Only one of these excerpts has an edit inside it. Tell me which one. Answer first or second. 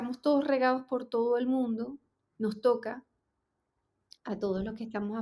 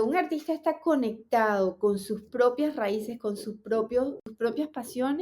second